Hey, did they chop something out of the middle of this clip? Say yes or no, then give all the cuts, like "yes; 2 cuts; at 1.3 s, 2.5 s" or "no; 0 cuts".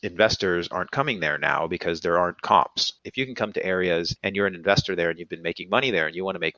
yes; 2 cuts; at 3.0 s, 4.2 s